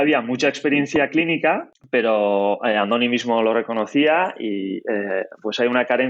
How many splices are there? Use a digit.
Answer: 1